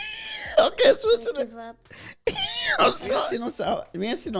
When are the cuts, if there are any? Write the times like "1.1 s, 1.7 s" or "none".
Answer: 3.3 s